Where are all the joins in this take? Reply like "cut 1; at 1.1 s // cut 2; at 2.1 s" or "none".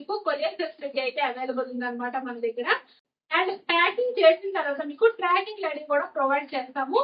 cut 1; at 3.1 s